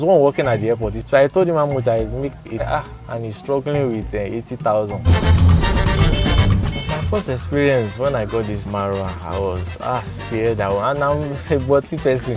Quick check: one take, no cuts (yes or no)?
no